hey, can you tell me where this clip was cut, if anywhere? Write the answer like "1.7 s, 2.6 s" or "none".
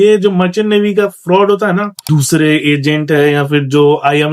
2.0 s